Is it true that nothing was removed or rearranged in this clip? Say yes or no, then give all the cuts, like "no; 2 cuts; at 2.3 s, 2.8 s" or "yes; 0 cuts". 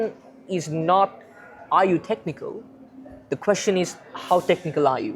yes; 0 cuts